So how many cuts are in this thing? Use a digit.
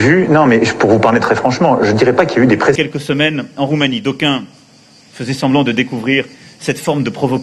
1